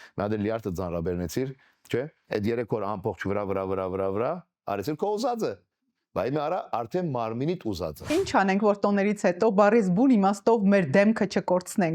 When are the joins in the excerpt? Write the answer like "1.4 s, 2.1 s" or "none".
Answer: 8.1 s